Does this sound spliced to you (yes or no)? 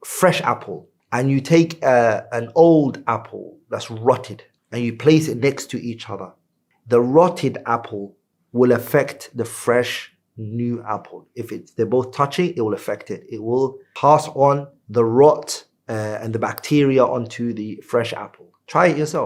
no